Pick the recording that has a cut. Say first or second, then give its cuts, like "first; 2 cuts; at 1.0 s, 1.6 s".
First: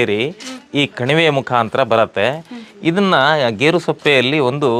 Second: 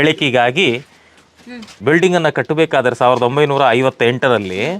second; 1 cut; at 1.7 s